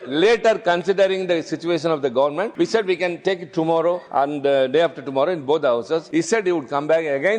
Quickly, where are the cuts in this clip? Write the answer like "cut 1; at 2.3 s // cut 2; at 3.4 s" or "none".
cut 1; at 2.5 s // cut 2; at 4.0 s // cut 3; at 6.1 s